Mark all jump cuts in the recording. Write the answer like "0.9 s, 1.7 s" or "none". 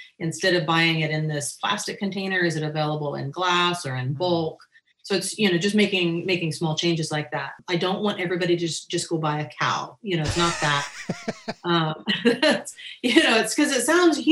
7.6 s